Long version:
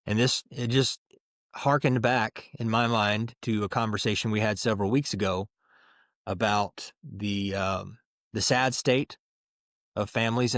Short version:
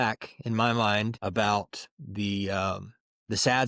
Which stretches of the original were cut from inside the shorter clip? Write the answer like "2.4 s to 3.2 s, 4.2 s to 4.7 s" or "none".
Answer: 3.3 s to 6.2 s

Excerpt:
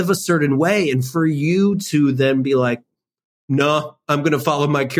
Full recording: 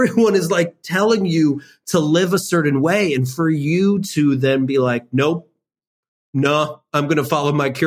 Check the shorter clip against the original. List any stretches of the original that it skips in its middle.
5.1 s to 5.7 s

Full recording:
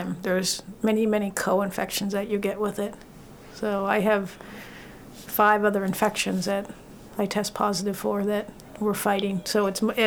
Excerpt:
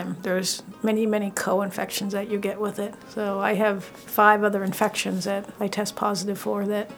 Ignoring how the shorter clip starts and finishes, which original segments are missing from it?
3.0 s to 3.5 s, 4.4 s to 5.2 s, 6.7 s to 7.1 s

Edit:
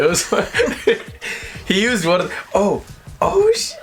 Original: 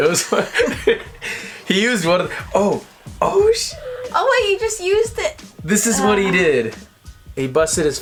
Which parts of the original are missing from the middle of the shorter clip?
none

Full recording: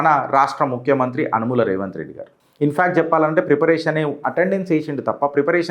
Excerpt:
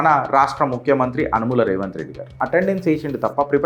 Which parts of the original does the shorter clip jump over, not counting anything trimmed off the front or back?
2.4 s to 4.2 s

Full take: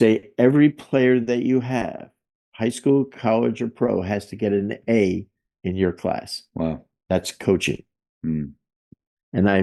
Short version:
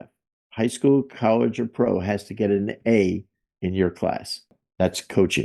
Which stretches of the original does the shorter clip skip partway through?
6.5 s to 6.8 s

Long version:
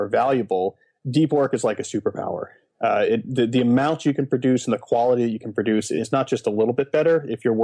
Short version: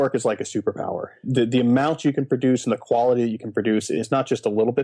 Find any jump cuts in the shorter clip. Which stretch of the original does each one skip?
2.6 s to 3.3 s

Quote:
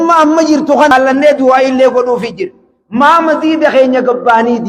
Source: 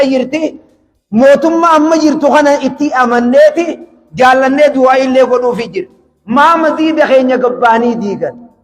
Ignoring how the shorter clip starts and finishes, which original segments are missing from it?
2.5 s to 4.3 s

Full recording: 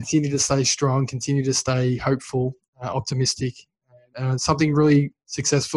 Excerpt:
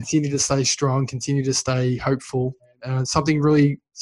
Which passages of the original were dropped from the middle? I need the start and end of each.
2.7 s to 4.0 s

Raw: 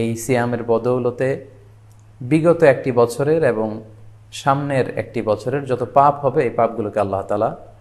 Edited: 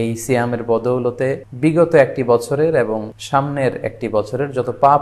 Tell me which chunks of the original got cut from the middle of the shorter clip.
1.5 s to 2.2 s, 3.8 s to 4.3 s

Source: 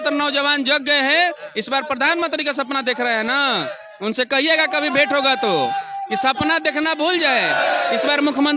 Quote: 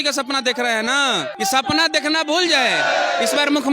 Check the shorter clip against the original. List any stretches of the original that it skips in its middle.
3.7 s to 6.0 s

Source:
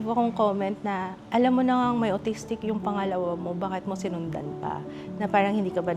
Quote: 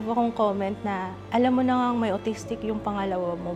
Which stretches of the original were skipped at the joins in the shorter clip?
none

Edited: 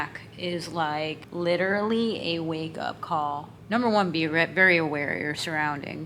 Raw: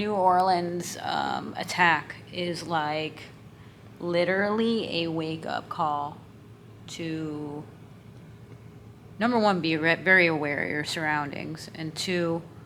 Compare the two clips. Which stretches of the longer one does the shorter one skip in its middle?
3.2 s to 3.9 s, 6.2 s to 9.0 s

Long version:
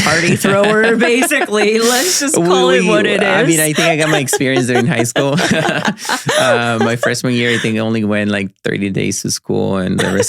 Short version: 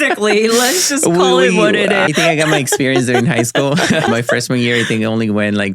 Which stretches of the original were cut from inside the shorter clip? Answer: 3.4 s to 3.7 s, 5.7 s to 6.8 s

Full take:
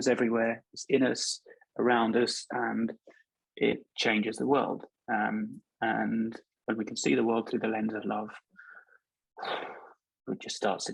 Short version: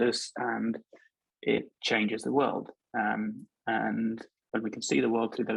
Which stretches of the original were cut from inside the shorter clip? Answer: none

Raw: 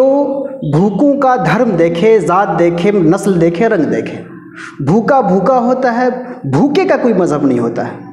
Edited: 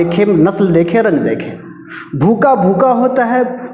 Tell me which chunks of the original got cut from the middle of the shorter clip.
none

